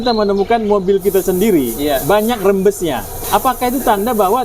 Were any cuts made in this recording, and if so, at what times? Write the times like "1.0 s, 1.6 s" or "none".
3.2 s